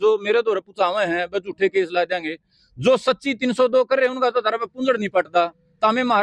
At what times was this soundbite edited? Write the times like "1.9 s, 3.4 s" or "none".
none